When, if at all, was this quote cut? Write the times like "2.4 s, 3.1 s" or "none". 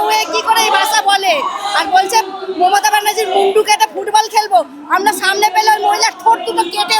none